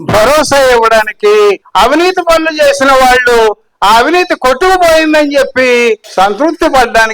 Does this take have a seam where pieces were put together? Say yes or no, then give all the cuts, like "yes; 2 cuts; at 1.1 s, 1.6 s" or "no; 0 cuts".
yes; 2 cuts; at 1.6 s, 6.0 s